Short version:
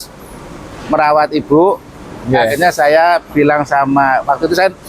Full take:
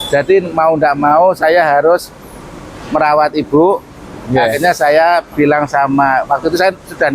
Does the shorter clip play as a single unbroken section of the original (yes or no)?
yes